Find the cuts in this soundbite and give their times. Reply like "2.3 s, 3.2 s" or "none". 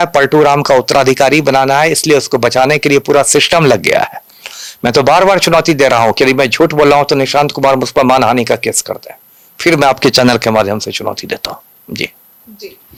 none